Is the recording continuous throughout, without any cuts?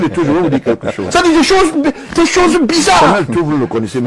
no; 2 cuts; at 0.9 s, 3.1 s

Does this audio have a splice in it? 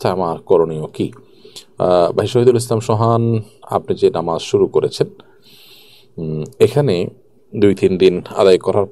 no; 0 cuts

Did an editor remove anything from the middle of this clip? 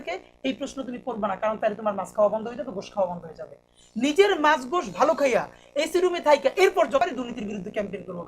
yes; 1 cut; at 7.0 s

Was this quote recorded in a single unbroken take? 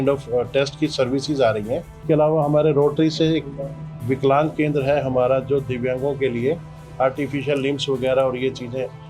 no; 1 cut; at 2.0 s

